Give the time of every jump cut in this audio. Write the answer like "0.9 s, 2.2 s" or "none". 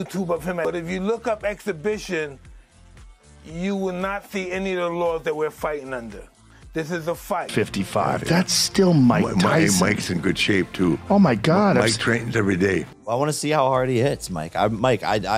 7.5 s